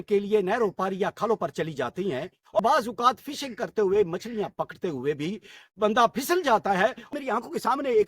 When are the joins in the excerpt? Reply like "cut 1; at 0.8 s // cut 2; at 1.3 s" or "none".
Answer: cut 1; at 2.6 s // cut 2; at 7.1 s

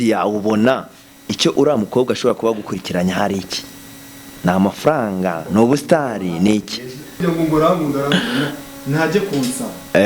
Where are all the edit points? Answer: cut 1; at 7.2 s

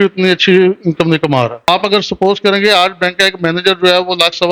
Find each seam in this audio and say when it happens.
cut 1; at 1.7 s

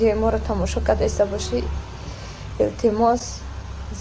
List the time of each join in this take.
none

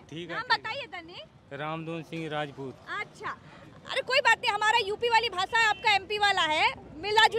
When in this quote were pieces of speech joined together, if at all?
none

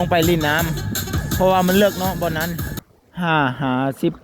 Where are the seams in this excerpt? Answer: cut 1; at 3.1 s

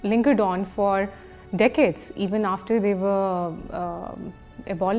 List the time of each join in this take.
none

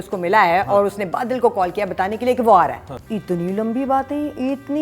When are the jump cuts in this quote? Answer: cut 1; at 2.9 s

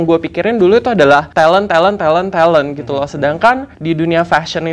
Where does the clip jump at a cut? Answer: cut 1; at 1.3 s // cut 2; at 3.7 s

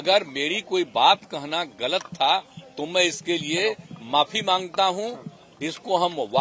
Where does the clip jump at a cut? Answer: none

